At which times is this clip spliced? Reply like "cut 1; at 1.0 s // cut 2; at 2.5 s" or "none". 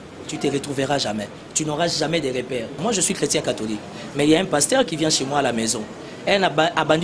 cut 1; at 2.8 s